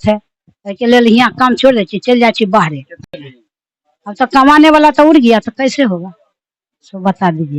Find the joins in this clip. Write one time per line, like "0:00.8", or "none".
0:03.1